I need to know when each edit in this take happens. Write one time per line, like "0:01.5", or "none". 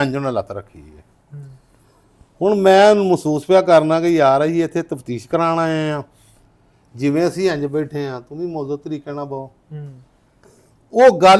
none